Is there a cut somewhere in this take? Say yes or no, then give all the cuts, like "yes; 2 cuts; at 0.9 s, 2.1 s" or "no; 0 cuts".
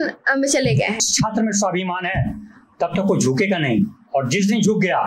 yes; 1 cut; at 1.1 s